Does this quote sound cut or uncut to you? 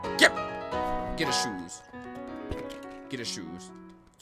uncut